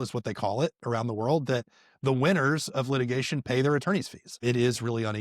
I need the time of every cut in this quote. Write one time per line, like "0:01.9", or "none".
0:04.3

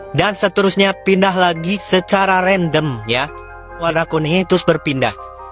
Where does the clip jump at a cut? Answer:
0:03.8

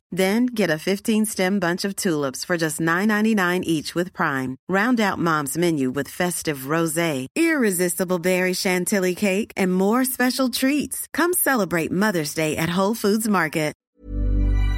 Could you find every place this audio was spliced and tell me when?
0:13.8

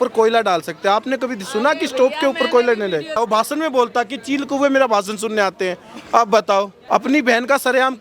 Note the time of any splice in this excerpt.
0:03.2
0:06.8

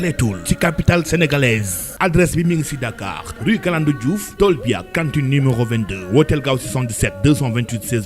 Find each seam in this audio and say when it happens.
0:01.9

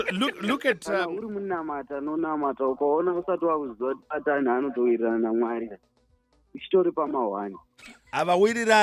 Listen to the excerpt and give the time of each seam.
0:01.0

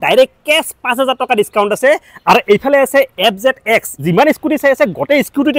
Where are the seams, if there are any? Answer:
0:04.0

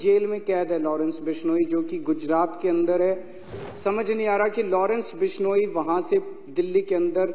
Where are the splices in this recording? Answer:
0:03.6

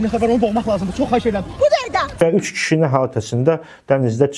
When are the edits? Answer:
0:02.1

